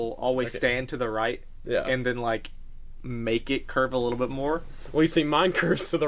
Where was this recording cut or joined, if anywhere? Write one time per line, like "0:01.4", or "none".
none